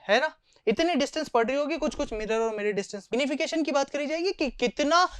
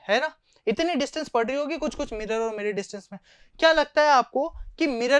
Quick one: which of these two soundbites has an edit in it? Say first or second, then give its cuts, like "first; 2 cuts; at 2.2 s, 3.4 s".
first; 1 cut; at 3.1 s